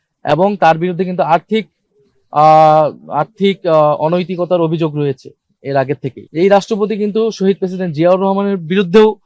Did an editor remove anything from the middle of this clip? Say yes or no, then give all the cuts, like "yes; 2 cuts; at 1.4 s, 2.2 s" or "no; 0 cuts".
yes; 1 cut; at 6.2 s